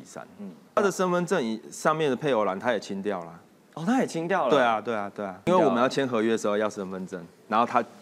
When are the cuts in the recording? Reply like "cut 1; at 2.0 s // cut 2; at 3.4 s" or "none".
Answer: cut 1; at 0.8 s // cut 2; at 5.5 s